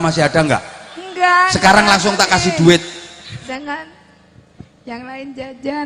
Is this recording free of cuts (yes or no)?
no